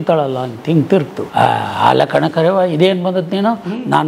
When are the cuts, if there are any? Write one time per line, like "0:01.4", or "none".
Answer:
0:01.2